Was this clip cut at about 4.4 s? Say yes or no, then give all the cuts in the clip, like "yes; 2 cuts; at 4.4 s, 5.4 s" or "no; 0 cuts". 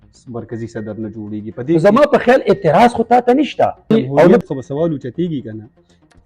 yes; 2 cuts; at 1.8 s, 4.4 s